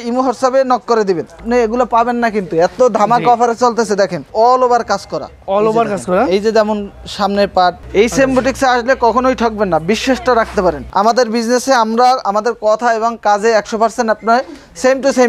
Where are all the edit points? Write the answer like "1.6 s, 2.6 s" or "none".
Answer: 1.4 s, 4.3 s, 7.8 s, 10.8 s